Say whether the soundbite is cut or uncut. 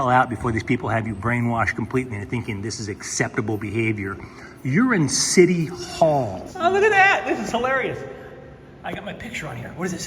cut